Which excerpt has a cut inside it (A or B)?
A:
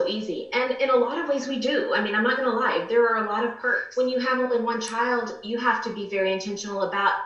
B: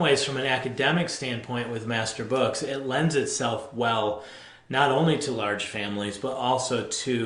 A